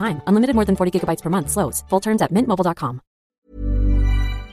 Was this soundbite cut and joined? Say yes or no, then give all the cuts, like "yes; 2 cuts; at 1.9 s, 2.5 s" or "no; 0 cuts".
yes; 1 cut; at 3.3 s